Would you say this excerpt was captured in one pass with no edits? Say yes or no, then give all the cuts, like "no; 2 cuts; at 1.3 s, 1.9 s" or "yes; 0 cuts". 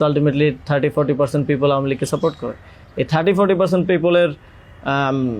yes; 0 cuts